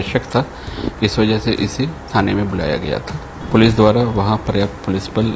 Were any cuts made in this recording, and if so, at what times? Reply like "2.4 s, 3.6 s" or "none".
3.4 s